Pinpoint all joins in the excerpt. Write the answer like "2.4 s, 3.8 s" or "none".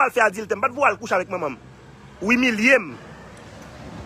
none